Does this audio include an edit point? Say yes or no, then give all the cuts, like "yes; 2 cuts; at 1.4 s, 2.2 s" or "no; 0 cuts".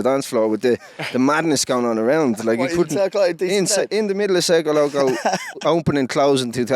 yes; 1 cut; at 5.6 s